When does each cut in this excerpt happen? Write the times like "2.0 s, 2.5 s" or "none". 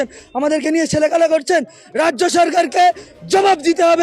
none